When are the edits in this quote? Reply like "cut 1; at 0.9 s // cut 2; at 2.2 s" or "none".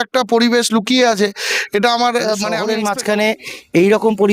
cut 1; at 2.6 s